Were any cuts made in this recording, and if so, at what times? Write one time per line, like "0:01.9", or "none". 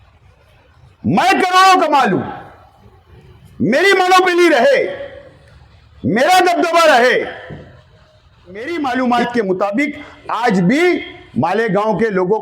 0:08.7